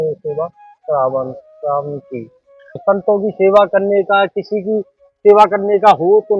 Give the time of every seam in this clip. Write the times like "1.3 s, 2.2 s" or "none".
2.8 s